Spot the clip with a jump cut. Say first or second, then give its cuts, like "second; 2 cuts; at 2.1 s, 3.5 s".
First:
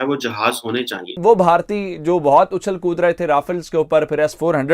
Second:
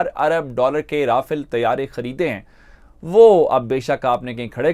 first; 1 cut; at 1.1 s